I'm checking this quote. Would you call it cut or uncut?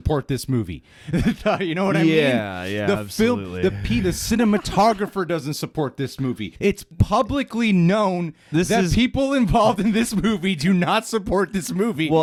uncut